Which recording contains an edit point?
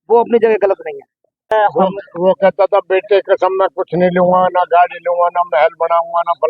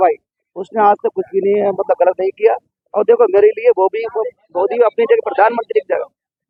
first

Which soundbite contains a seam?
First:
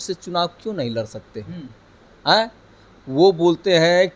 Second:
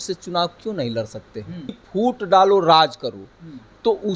second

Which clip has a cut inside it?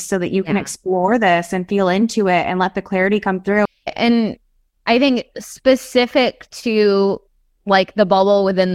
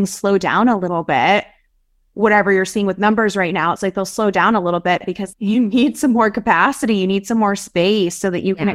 first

